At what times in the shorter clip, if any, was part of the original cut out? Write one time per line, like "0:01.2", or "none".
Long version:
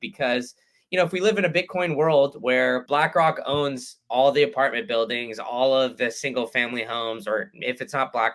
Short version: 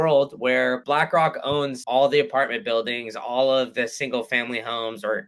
0:01.8